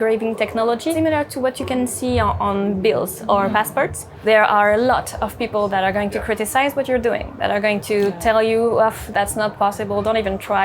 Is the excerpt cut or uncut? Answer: cut